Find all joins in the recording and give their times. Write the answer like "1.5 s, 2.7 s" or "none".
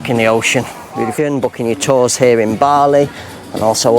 1.1 s